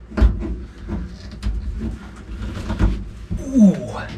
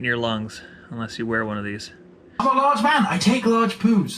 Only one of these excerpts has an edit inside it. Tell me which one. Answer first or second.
second